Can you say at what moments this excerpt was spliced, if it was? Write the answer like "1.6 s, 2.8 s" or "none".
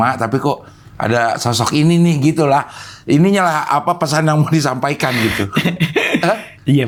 none

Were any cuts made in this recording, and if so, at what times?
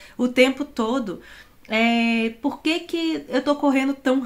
none

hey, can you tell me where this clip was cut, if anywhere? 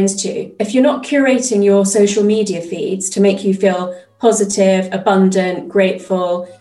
none

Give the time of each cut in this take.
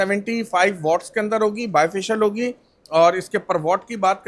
none

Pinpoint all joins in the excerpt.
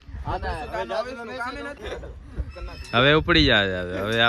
1.8 s

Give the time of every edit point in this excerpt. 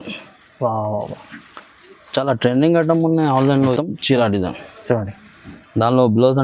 3.7 s

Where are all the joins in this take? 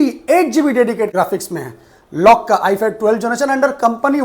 1.1 s

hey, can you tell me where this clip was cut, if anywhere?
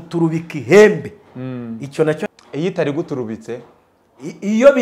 2.3 s

